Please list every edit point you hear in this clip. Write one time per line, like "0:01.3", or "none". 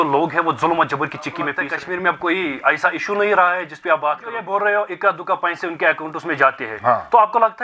0:01.5
0:04.3